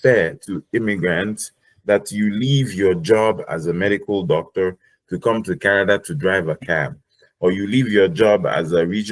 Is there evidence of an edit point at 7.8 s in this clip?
no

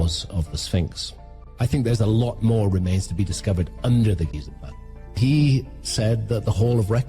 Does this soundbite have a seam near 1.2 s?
yes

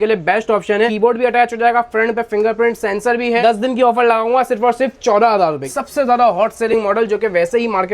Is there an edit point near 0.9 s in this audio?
yes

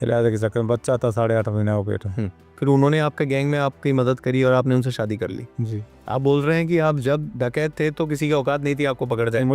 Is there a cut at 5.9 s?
yes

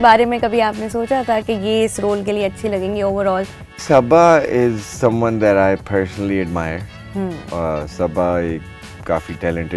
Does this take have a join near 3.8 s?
yes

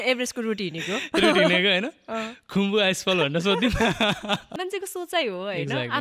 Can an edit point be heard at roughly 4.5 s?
yes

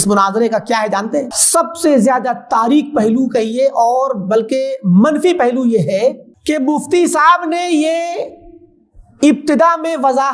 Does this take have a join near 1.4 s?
yes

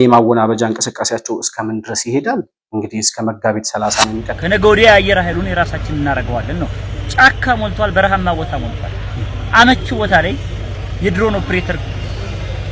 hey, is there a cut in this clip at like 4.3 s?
yes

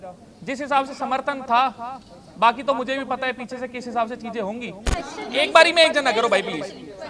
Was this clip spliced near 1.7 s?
no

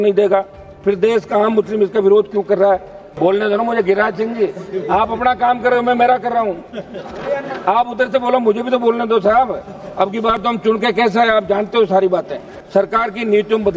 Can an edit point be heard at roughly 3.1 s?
yes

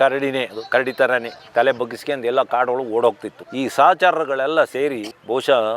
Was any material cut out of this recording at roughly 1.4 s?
yes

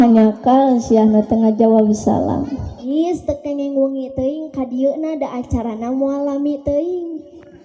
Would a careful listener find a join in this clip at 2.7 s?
yes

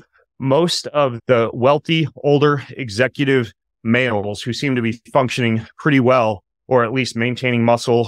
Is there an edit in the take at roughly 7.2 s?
no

